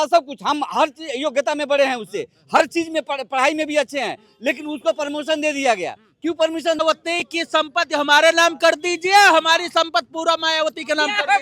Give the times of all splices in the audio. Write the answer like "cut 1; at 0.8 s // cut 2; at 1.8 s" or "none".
cut 1; at 6.8 s